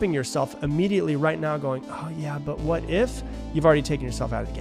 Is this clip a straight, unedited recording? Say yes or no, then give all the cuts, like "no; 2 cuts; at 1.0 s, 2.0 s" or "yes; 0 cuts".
yes; 0 cuts